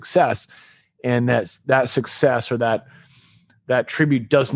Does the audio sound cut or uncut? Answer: uncut